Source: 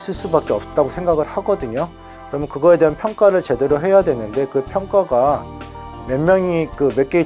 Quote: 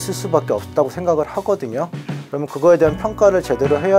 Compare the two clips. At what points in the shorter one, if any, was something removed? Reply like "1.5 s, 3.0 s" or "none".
none